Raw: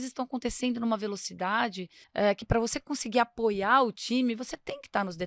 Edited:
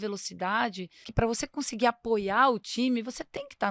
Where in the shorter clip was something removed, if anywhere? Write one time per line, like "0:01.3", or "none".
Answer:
0:01.1